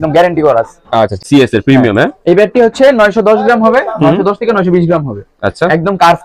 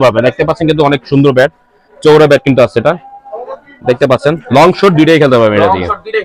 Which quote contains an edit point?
first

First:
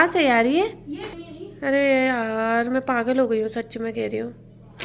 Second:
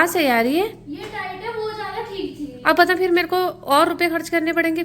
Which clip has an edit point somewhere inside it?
first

